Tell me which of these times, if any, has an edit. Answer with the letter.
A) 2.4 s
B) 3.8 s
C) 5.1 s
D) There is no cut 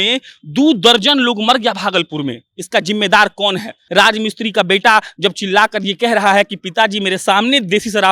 B